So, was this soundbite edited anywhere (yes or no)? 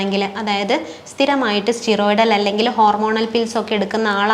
no